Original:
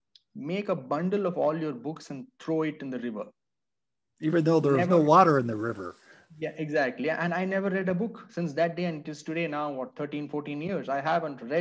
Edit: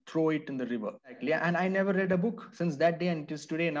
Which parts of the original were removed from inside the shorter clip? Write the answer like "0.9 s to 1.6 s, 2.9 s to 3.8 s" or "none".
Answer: 3.5 s to 7.0 s